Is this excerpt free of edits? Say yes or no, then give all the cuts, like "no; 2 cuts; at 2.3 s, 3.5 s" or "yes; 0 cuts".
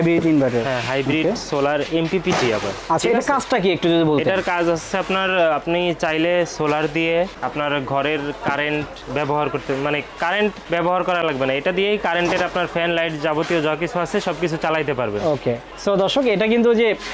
yes; 0 cuts